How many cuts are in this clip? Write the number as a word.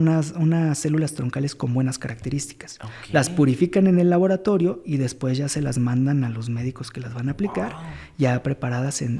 zero